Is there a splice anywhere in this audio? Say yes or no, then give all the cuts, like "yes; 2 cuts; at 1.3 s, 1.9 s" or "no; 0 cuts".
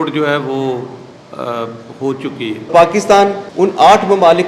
yes; 2 cuts; at 2.7 s, 3.4 s